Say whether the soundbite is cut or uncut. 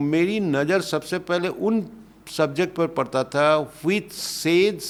uncut